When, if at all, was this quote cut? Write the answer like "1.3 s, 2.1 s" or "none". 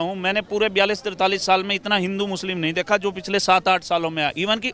none